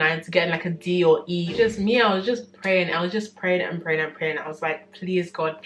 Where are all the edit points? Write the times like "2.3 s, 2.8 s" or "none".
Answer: 1.7 s